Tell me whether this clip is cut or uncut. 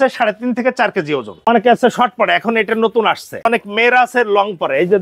cut